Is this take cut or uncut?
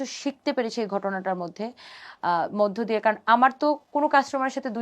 uncut